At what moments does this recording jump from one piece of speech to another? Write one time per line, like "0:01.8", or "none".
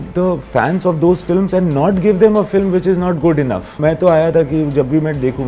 0:03.7